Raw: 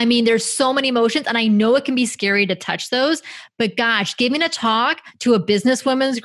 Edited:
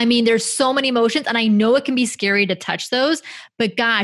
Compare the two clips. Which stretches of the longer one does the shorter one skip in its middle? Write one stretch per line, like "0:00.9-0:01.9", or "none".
none